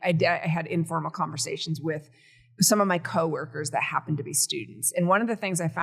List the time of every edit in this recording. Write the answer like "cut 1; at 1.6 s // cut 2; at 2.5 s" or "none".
none